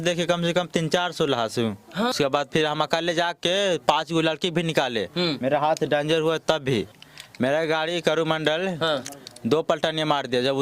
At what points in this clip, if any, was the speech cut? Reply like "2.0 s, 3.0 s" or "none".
2.1 s, 7.0 s